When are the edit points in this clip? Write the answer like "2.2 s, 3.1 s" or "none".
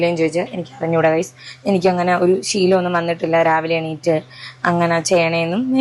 none